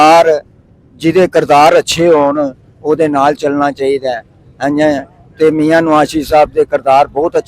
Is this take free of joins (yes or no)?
yes